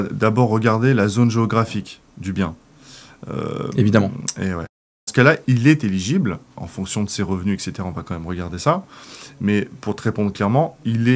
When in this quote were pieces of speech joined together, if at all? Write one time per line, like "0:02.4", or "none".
0:04.7